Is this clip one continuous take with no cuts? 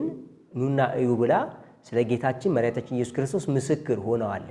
yes; 0 cuts

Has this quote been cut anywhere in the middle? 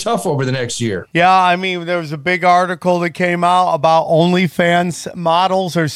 yes; 1 cut; at 1.0 s

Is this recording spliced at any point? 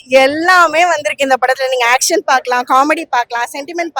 no; 0 cuts

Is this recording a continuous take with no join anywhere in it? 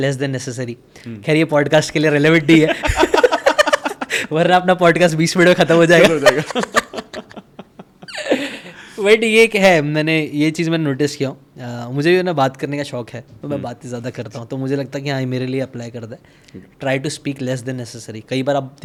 yes; 0 cuts

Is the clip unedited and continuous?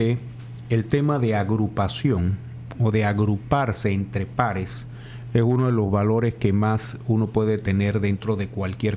yes; 0 cuts

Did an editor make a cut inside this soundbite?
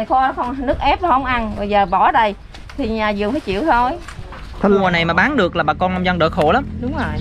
yes; 1 cut; at 4.7 s

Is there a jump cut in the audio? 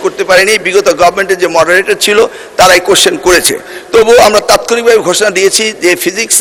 no; 0 cuts

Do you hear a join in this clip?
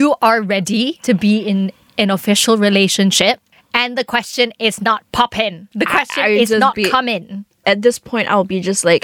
yes; 2 cuts; at 1.0 s, 5.6 s

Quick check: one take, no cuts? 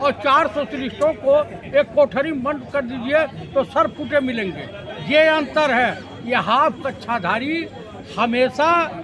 yes; 0 cuts

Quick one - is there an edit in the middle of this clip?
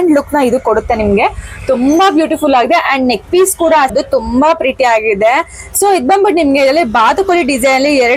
yes; 1 cut; at 3.9 s

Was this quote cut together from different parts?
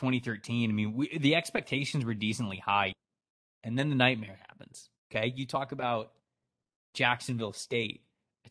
yes; 1 cut; at 2.9 s

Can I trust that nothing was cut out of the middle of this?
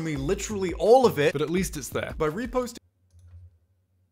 yes; 0 cuts

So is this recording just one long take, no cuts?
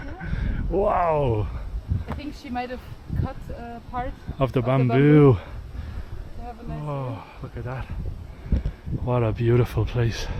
yes; 0 cuts

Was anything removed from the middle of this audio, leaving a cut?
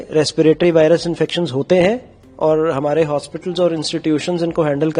no; 0 cuts

